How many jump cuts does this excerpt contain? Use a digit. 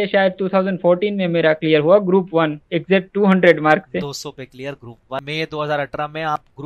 1